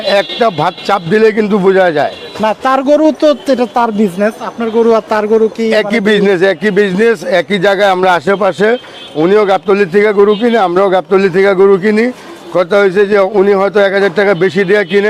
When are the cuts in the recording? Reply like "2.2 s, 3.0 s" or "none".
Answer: none